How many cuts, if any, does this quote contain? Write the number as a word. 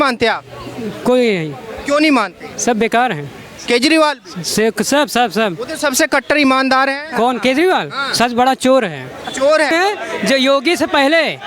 one